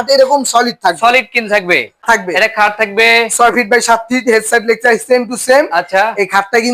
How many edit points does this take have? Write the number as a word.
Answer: one